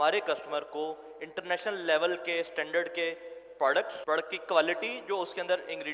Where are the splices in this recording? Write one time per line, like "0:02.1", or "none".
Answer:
0:03.9

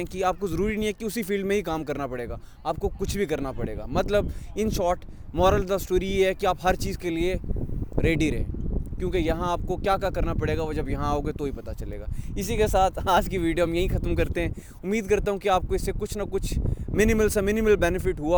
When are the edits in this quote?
none

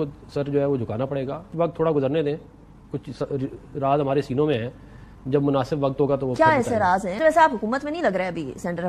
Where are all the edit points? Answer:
0:01.5
0:07.1

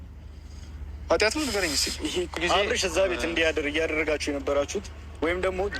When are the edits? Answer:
0:02.3

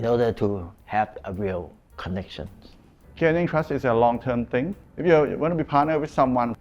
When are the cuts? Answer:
0:04.8

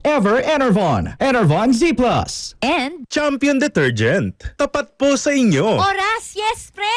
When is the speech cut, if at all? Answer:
0:02.8
0:05.8

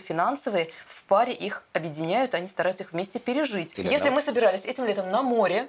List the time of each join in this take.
0:03.7

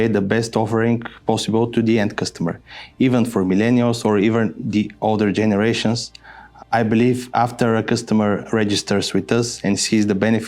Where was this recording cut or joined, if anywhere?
0:06.5

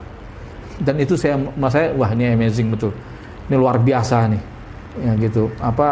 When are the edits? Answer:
none

